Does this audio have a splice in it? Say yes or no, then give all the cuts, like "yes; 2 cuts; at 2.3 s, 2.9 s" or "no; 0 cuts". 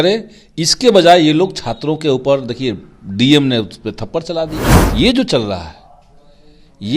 yes; 1 cut; at 4.7 s